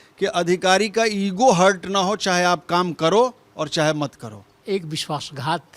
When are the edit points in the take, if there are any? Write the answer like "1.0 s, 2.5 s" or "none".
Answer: 4.5 s